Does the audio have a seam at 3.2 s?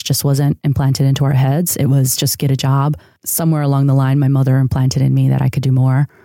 yes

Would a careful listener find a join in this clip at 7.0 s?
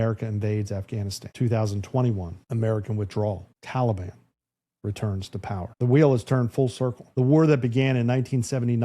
yes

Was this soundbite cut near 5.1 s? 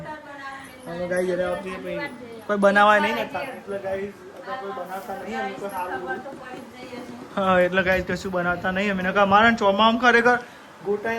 no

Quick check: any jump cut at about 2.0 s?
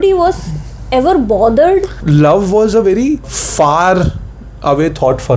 yes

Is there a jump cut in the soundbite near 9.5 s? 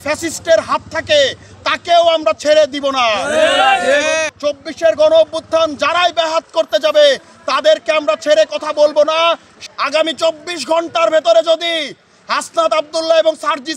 yes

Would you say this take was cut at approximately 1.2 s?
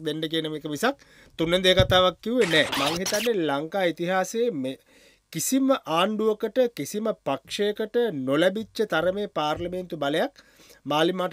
no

